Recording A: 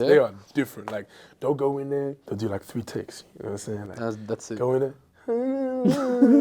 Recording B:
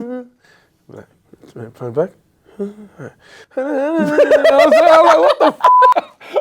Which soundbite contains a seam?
A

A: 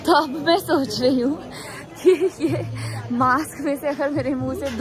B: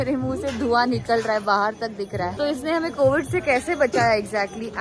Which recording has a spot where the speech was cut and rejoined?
B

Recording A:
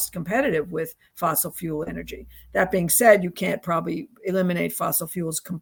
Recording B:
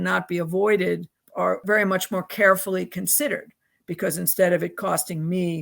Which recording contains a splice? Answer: B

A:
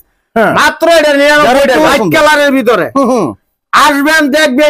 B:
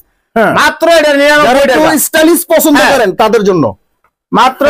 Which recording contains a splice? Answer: A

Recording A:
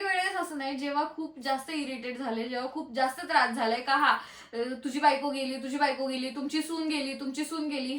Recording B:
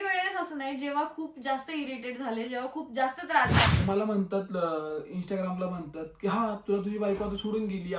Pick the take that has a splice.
B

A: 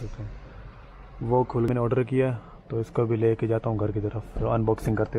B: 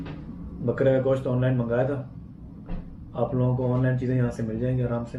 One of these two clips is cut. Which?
A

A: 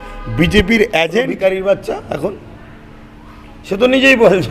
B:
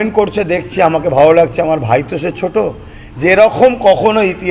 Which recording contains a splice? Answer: A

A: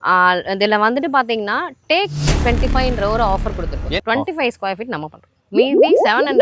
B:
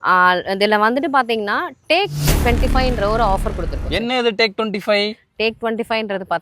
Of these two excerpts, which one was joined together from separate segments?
A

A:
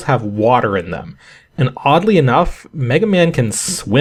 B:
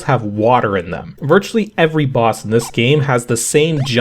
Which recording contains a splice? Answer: B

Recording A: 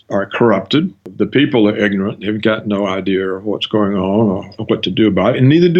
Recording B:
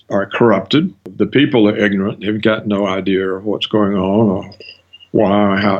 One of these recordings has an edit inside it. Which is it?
A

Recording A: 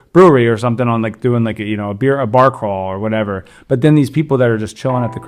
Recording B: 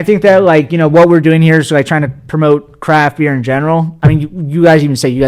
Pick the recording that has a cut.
B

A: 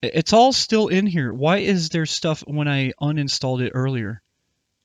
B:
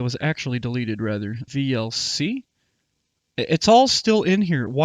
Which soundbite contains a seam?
B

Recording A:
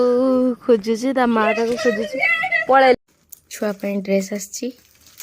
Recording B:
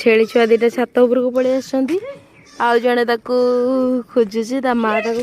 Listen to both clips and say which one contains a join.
A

